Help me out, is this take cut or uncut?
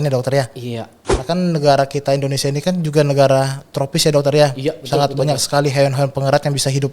cut